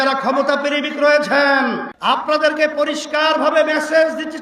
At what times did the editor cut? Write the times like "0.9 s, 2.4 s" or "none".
1.9 s